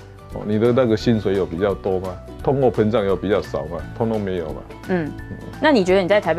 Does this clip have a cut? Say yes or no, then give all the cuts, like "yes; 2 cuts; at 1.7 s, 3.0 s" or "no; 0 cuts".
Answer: no; 0 cuts